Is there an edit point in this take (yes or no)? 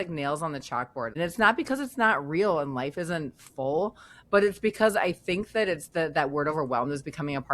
yes